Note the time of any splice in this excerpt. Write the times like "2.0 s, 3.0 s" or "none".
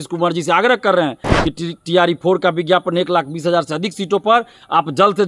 none